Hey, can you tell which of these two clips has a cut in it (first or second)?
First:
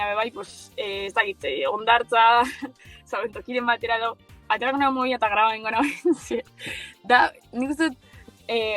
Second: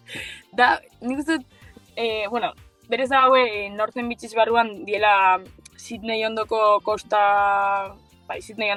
first